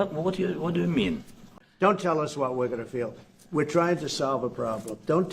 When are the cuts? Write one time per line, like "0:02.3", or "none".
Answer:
0:01.5